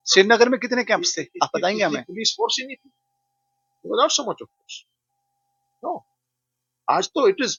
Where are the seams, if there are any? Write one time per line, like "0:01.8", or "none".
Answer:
none